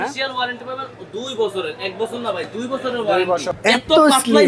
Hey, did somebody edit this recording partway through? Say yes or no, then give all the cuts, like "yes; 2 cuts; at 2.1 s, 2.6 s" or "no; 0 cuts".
yes; 1 cut; at 3.5 s